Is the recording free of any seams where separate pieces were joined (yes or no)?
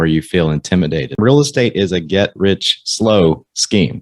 no